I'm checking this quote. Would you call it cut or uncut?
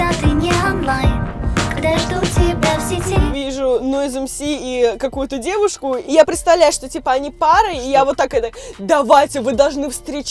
cut